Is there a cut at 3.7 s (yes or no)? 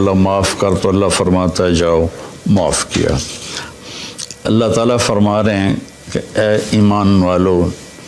yes